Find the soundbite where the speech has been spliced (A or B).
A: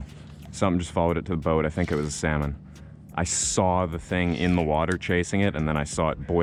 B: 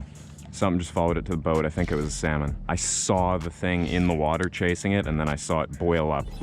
B